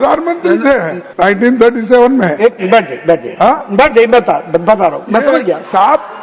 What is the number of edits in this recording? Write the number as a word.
one